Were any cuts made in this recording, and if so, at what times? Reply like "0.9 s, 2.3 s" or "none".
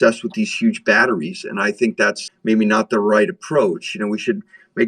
none